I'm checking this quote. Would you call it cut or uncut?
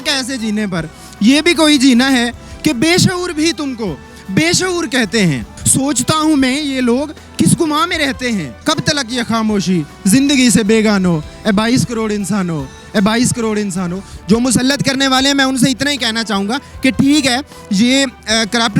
cut